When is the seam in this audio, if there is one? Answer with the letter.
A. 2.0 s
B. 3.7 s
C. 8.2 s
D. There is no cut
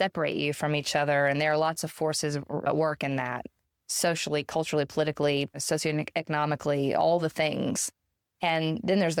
D